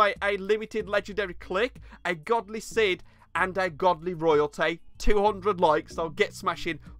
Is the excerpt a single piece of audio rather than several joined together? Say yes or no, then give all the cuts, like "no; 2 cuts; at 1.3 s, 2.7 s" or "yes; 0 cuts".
yes; 0 cuts